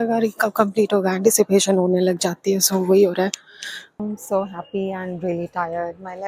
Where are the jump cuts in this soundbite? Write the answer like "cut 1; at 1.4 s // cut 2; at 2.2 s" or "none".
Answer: cut 1; at 4.0 s